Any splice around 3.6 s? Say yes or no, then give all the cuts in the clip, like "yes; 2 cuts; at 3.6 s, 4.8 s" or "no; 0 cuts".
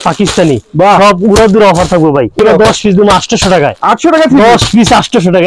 no; 1 cut; at 2.4 s